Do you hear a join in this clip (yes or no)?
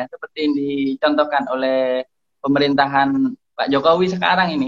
no